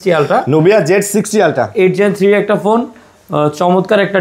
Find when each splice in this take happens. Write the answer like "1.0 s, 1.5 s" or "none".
none